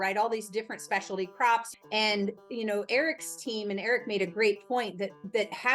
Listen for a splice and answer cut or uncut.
cut